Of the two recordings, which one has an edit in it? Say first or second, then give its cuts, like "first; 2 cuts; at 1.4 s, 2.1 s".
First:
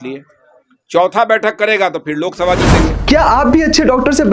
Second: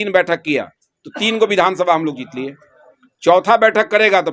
first; 1 cut; at 3.0 s